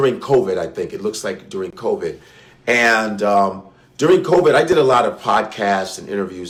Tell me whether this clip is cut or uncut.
uncut